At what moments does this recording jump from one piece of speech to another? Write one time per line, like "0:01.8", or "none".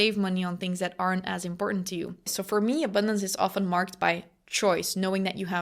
0:02.3